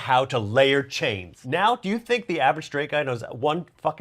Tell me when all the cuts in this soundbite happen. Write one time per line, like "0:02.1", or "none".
0:01.4